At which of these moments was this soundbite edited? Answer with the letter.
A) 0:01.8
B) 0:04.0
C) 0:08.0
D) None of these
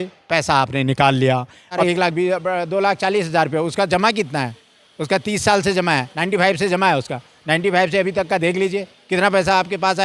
A